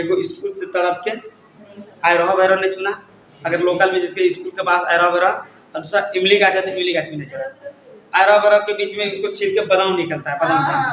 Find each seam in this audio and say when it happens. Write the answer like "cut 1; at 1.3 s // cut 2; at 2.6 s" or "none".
none

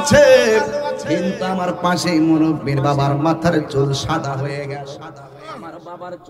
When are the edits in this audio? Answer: none

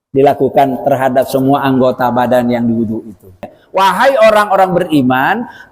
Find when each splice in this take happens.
cut 1; at 3.6 s

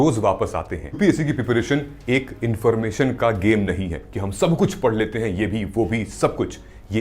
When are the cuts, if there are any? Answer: cut 1; at 1.0 s

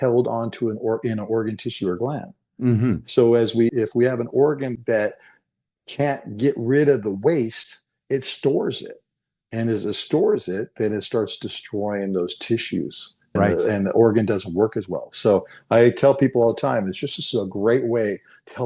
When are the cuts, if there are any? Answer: none

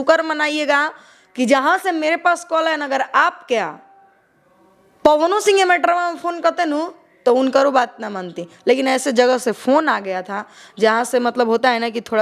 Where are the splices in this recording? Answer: none

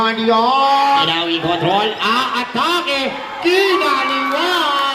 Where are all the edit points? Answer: cut 1; at 1.0 s

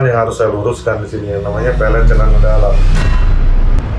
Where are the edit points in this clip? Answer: none

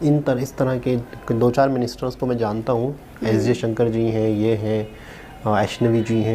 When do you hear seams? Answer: none

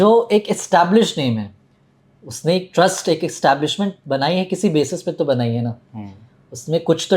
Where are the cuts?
none

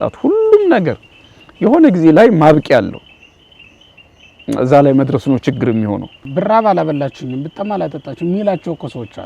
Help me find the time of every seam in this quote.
cut 1; at 6.2 s

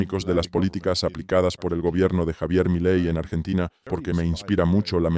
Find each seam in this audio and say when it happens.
cut 1; at 3.8 s

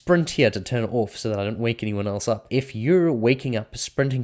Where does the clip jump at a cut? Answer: cut 1; at 2.4 s

